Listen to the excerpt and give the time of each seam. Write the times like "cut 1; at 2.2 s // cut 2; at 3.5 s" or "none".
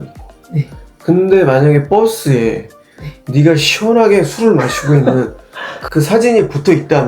cut 1; at 5.9 s